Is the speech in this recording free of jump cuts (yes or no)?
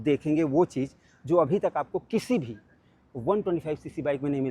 yes